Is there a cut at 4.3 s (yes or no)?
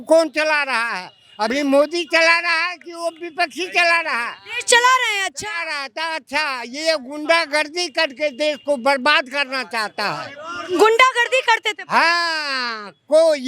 no